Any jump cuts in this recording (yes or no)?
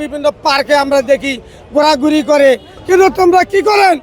yes